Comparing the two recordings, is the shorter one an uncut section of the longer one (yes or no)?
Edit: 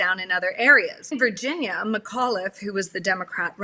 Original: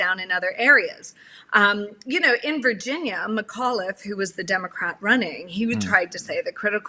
no